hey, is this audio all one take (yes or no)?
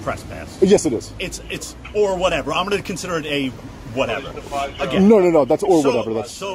yes